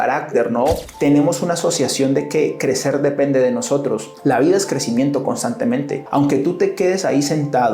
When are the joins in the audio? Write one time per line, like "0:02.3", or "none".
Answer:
0:00.9
0:04.1
0:06.0